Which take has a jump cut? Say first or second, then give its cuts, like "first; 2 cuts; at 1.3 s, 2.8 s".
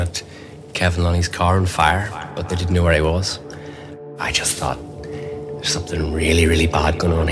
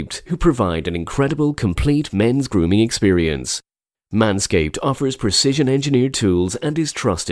first; 2 cuts; at 2.3 s, 4.1 s